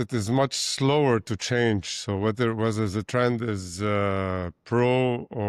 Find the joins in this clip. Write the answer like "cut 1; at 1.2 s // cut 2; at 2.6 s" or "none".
none